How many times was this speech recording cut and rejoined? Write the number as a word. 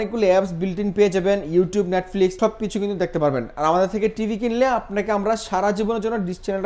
zero